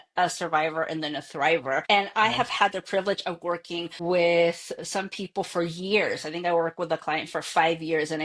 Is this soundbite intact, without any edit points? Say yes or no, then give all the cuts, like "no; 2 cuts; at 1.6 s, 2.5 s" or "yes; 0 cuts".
no; 2 cuts; at 1.8 s, 3.9 s